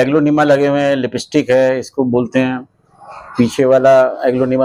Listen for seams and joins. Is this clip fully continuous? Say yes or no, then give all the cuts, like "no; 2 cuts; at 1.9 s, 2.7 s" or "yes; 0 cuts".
yes; 0 cuts